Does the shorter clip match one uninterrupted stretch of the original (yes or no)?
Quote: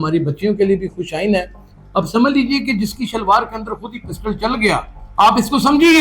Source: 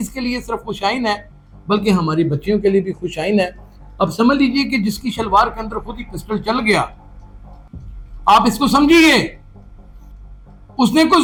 no